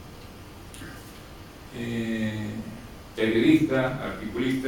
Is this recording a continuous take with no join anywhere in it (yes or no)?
no